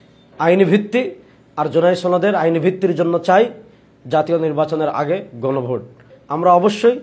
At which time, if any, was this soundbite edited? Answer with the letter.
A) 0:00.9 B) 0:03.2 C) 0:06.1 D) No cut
C